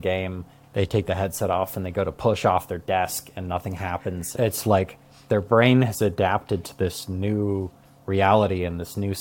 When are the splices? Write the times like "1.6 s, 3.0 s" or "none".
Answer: none